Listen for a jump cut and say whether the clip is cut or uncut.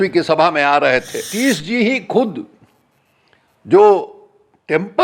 cut